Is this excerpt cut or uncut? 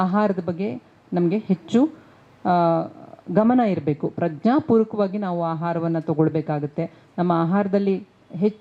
uncut